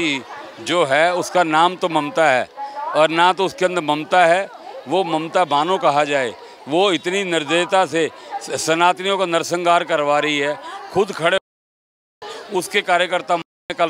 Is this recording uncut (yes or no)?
yes